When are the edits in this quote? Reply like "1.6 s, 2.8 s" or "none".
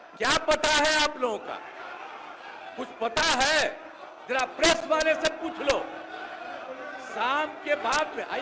none